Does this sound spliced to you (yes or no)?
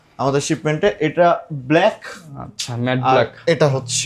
no